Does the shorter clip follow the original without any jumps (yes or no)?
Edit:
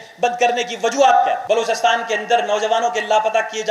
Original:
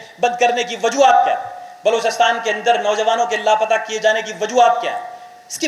no